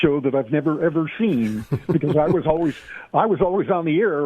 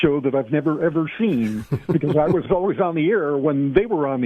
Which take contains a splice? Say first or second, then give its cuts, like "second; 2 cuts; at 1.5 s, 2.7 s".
second; 1 cut; at 2.5 s